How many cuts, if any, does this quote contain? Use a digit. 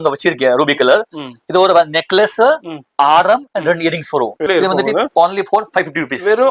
1